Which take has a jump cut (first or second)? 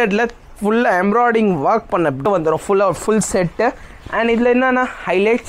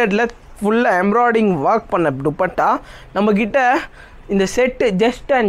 first